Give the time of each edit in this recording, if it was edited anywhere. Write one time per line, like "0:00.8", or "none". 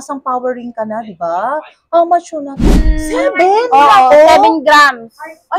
0:02.9